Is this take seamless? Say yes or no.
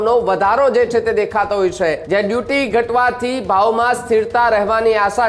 no